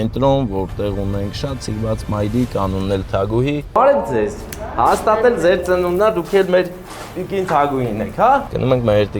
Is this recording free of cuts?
no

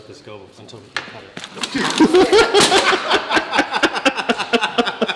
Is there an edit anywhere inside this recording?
no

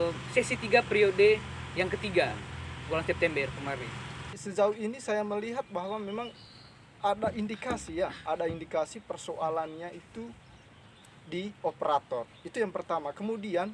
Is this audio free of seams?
no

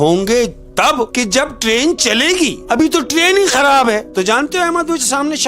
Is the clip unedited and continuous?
no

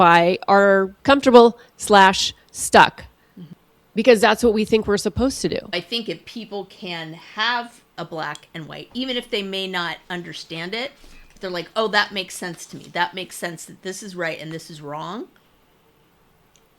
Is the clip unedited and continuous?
no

